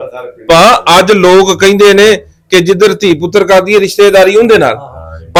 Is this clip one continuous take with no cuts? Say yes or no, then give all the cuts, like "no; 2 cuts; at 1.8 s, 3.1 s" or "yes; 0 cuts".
yes; 0 cuts